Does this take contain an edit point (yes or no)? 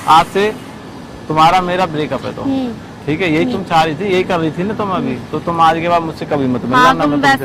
no